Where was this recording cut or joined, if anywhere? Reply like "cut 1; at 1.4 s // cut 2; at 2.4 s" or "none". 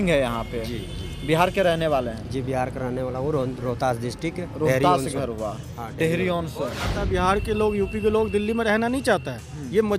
cut 1; at 6.9 s